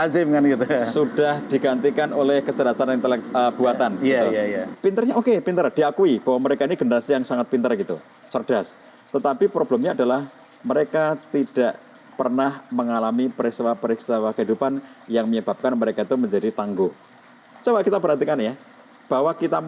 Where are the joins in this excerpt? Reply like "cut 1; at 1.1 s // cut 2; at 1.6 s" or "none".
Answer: cut 1; at 4.7 s // cut 2; at 17.5 s